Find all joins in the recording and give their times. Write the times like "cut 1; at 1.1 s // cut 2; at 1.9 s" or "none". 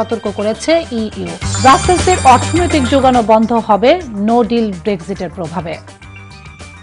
cut 1; at 5.8 s